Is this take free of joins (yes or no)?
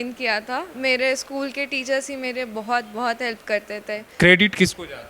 no